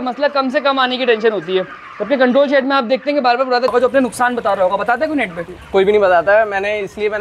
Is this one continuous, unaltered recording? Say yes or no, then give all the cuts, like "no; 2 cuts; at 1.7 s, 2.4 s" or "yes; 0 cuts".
no; 1 cut; at 3.7 s